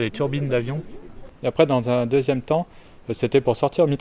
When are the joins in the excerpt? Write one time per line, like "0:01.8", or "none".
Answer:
0:01.3